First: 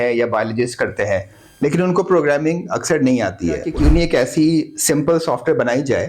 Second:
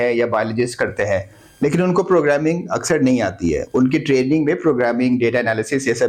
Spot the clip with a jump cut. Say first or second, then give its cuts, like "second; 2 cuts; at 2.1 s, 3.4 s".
first; 1 cut; at 3.7 s